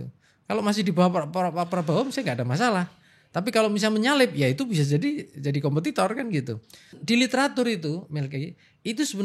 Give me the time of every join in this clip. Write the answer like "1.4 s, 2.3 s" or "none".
7.0 s